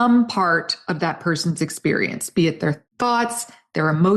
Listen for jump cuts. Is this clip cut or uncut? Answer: cut